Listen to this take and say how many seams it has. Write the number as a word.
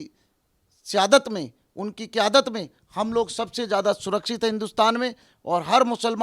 one